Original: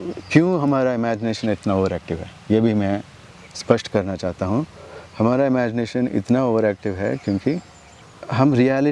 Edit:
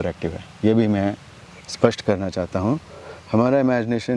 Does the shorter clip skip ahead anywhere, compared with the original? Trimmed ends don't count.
no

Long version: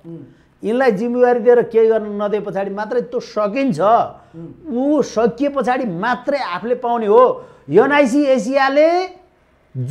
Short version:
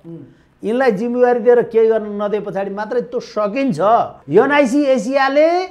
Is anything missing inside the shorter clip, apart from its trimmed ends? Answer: yes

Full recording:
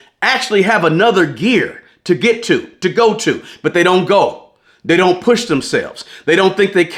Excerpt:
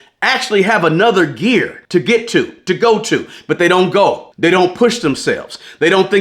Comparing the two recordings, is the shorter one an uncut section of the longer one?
no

